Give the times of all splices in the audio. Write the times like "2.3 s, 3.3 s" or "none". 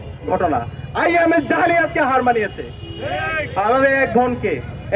none